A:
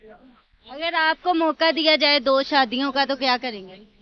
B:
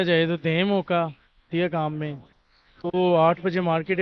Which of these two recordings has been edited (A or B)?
B